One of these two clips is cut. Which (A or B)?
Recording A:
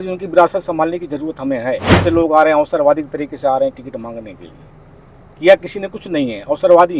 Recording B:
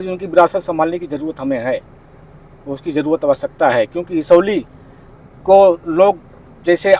A